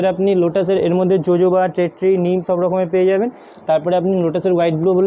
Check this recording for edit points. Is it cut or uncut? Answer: uncut